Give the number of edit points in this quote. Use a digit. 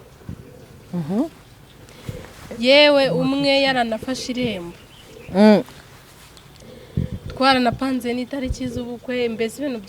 0